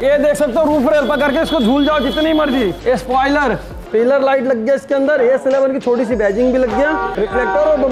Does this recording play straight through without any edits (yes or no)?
no